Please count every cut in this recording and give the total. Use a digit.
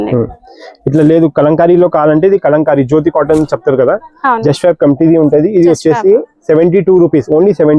0